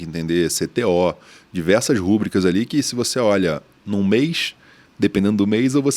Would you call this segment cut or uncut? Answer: uncut